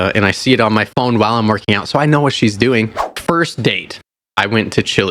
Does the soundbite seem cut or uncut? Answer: cut